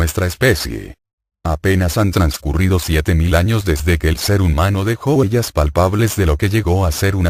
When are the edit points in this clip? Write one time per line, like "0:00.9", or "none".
none